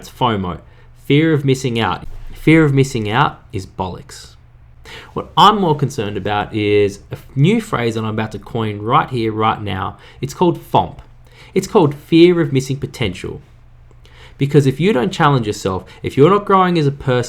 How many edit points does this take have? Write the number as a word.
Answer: two